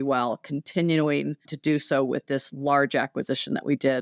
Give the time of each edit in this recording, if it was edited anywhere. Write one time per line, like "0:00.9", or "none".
0:01.4